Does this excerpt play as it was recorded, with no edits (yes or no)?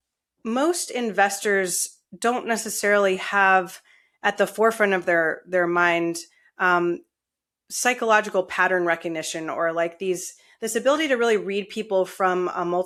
yes